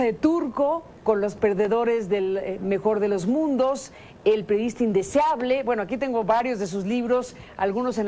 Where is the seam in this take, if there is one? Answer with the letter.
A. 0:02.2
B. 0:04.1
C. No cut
C